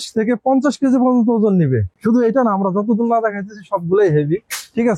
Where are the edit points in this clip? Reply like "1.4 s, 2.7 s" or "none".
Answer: none